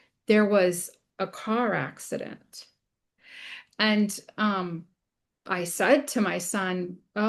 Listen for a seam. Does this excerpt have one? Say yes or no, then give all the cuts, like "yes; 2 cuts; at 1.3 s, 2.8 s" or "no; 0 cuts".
no; 0 cuts